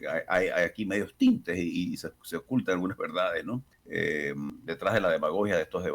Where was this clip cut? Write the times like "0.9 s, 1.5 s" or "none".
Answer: 3.8 s, 4.5 s